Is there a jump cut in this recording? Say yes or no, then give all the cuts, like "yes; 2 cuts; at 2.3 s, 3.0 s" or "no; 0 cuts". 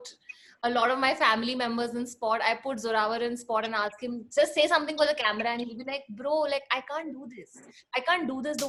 no; 0 cuts